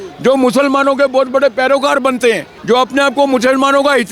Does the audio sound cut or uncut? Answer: cut